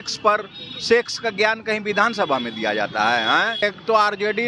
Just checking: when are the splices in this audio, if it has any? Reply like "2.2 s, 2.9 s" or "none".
3.6 s